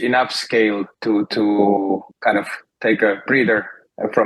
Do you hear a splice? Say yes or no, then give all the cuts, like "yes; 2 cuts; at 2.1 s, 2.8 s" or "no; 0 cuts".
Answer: yes; 2 cuts; at 0.9 s, 2.1 s